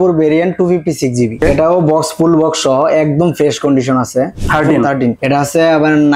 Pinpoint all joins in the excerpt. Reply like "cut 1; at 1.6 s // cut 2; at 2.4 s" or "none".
cut 1; at 1.4 s // cut 2; at 4.4 s // cut 3; at 5.2 s